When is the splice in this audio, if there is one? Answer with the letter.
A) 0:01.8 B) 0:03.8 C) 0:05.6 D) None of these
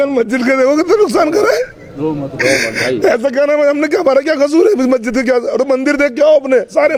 D